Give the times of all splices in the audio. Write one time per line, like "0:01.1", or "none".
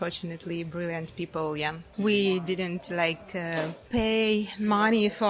0:01.8
0:03.8